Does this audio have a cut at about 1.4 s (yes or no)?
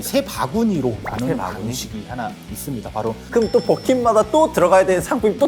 no